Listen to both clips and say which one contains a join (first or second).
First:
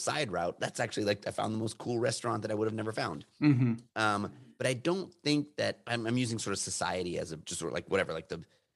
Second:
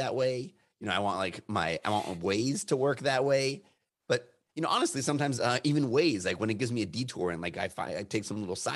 first